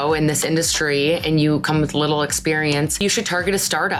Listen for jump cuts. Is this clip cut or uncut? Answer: uncut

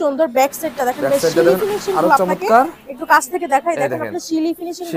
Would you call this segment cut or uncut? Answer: uncut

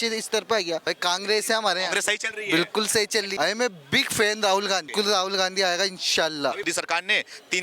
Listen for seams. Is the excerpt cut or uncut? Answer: cut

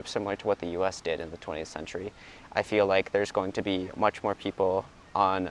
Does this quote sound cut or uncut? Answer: uncut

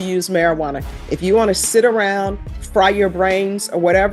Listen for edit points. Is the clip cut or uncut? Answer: uncut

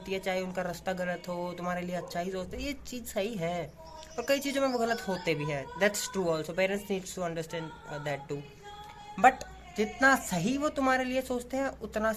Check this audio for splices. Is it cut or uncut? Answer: uncut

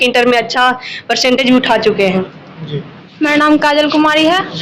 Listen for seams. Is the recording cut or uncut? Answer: cut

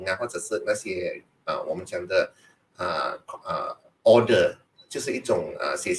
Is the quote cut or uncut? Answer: uncut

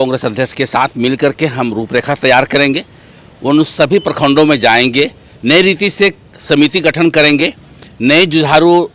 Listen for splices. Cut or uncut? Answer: uncut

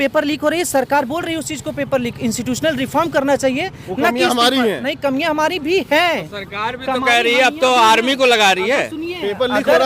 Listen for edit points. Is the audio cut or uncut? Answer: uncut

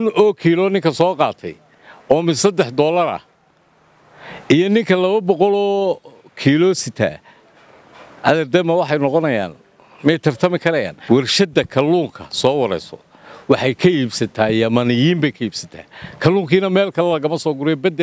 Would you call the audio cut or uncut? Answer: cut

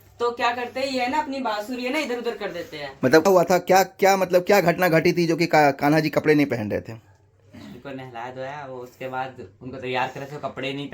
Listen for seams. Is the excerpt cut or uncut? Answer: cut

